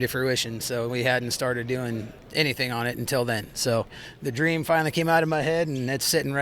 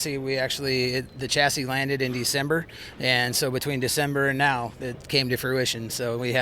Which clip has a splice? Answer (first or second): first